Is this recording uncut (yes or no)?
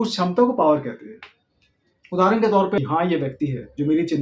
no